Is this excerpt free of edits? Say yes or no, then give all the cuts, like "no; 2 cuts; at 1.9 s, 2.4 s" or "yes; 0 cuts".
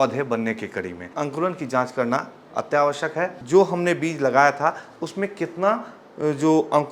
no; 2 cuts; at 1.1 s, 3.4 s